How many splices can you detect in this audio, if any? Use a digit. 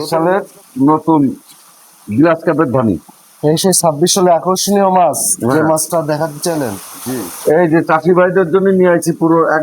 1